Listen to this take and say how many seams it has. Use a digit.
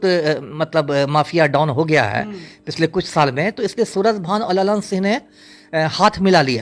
0